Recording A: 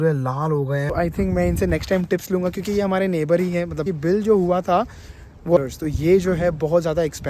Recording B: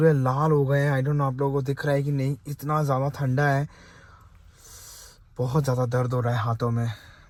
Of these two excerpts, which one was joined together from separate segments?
A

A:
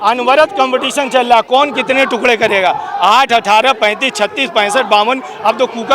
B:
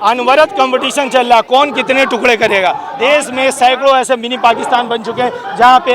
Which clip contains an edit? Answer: B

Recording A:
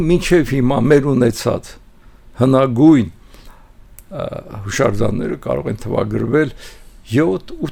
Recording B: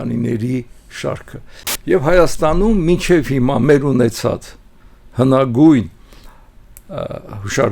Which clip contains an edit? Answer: B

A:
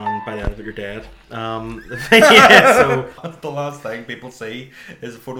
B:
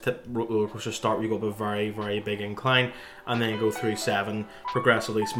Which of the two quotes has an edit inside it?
A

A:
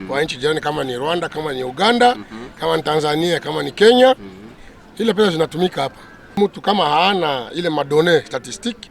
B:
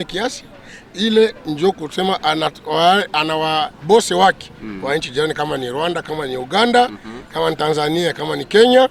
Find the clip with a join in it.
A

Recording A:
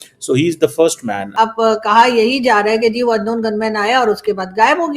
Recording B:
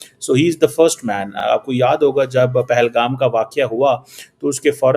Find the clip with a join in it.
A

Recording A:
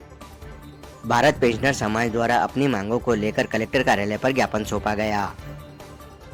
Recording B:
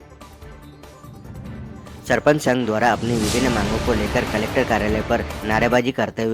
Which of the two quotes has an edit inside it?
B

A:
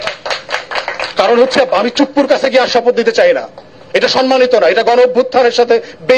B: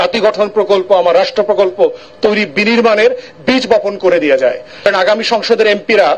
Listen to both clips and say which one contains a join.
B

